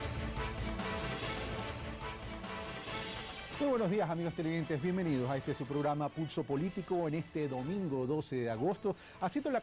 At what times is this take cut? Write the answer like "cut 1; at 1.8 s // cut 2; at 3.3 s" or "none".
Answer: cut 1; at 1.2 s

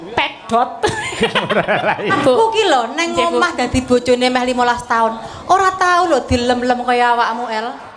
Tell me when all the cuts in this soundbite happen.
cut 1; at 2.2 s

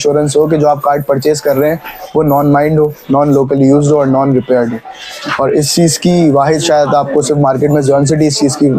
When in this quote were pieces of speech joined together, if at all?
none

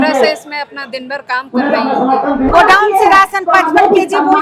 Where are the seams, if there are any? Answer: cut 1; at 2.5 s

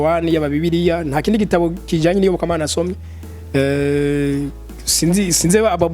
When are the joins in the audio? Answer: none

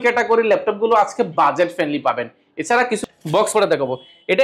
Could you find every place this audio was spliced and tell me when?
cut 1; at 3.0 s

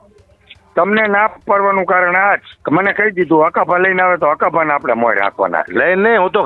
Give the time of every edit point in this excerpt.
cut 1; at 2.5 s

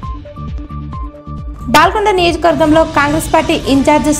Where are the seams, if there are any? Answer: cut 1; at 1.1 s

